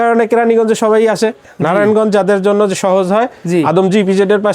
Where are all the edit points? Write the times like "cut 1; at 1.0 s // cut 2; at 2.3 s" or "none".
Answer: cut 1; at 1.5 s